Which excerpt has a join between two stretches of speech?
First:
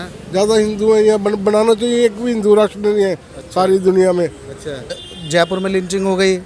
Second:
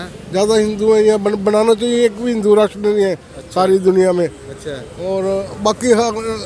first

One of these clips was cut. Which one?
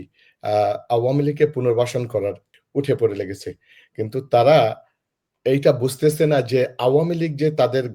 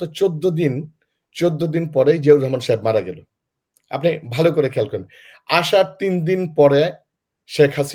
first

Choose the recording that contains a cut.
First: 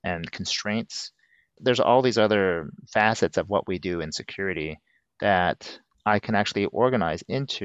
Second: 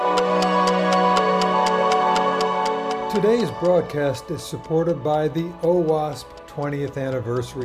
second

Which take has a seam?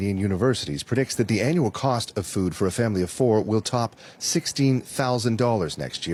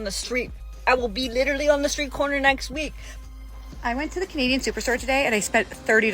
second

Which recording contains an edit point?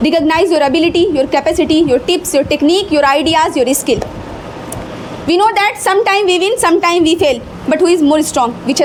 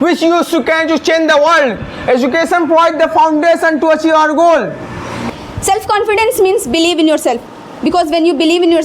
second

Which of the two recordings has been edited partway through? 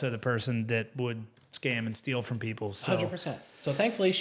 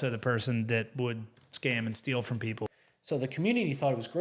second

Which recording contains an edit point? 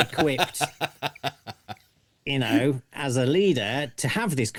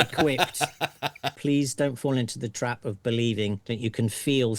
second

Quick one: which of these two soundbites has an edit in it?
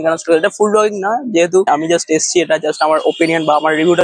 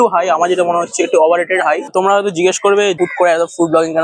second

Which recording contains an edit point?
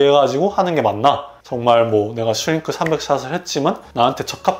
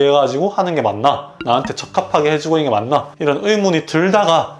second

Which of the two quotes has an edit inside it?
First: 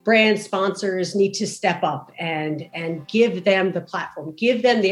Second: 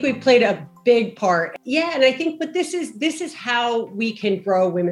second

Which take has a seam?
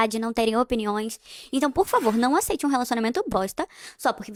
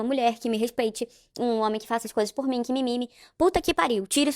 second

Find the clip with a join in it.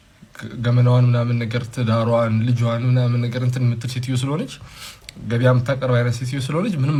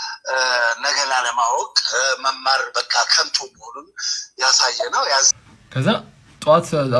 second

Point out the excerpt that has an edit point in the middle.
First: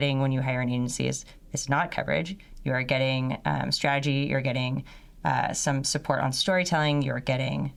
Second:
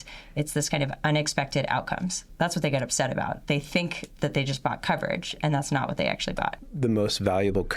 second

